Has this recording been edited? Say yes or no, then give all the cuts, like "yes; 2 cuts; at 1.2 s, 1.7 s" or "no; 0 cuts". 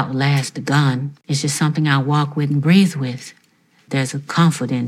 yes; 2 cuts; at 1.2 s, 3.7 s